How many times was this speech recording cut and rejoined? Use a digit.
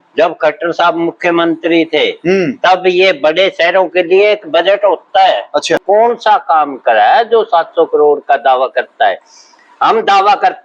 1